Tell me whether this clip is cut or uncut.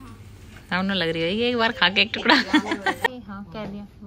cut